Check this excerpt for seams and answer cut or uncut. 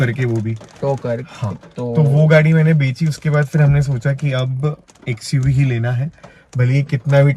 uncut